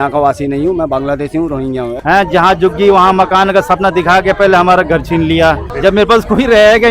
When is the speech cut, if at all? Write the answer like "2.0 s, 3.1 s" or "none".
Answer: 1.9 s, 5.7 s